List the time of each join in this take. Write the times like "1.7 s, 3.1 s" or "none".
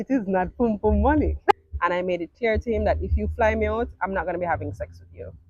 1.5 s